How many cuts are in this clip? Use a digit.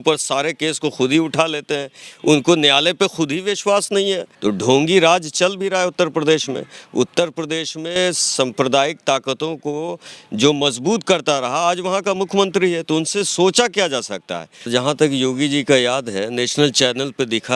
2